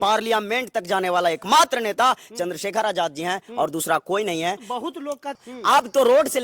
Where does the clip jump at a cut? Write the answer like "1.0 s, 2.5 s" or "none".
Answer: 5.5 s